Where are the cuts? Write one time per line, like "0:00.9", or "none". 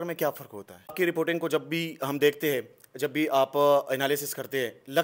0:00.9